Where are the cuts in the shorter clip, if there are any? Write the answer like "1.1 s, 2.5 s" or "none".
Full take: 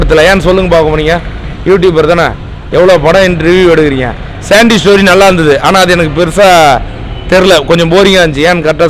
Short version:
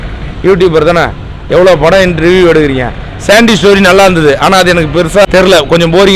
5.2 s